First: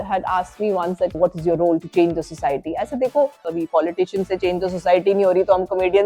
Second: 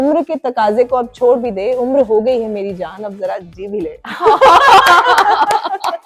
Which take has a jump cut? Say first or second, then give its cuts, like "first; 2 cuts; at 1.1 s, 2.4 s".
first; 2 cuts; at 1.1 s, 3.5 s